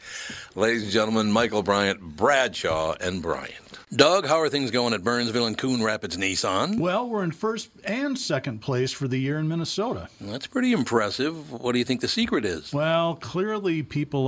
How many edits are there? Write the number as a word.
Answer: one